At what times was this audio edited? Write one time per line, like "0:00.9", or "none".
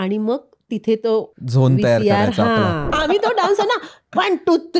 0:01.4
0:02.9